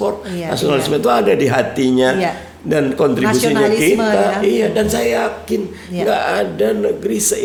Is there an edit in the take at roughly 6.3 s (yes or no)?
no